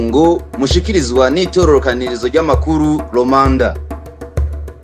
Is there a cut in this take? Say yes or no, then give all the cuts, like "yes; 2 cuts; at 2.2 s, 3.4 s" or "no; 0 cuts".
no; 0 cuts